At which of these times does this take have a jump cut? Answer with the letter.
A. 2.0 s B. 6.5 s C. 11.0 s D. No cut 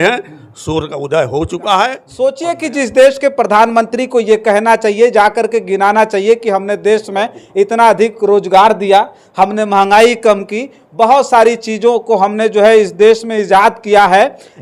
A